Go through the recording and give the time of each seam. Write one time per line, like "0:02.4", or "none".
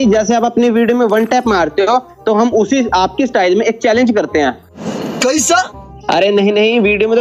0:05.9